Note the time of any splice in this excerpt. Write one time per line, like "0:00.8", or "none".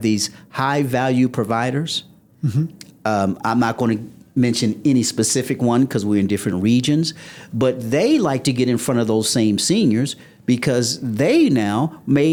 none